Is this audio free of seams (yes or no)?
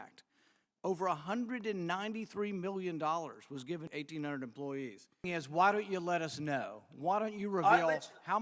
no